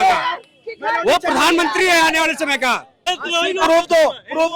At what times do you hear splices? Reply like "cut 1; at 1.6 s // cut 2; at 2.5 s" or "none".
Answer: cut 1; at 3.2 s